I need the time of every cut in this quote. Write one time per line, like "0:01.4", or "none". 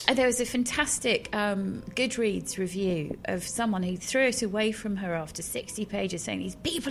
0:01.8